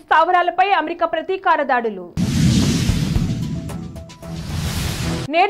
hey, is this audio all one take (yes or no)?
yes